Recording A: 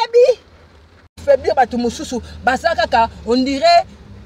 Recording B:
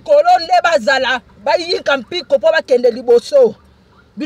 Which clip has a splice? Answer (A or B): A